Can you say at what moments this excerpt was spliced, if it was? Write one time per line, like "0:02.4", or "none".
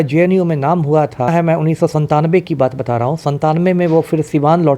0:01.3